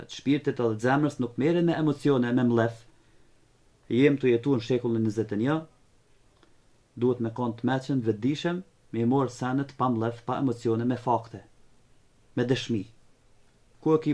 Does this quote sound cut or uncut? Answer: uncut